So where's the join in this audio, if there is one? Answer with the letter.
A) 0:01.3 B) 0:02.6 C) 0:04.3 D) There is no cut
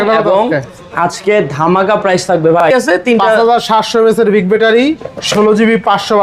B